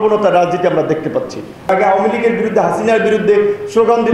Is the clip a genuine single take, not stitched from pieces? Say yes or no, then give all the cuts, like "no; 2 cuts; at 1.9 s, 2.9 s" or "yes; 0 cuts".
no; 1 cut; at 1.7 s